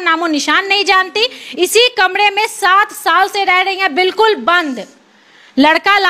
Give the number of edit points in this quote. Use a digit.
0